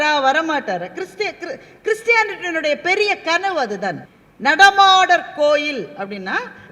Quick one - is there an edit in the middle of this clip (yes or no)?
yes